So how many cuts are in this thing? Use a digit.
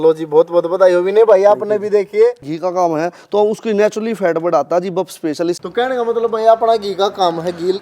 2